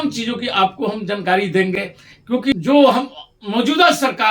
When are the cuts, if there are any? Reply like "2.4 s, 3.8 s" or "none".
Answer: 2.4 s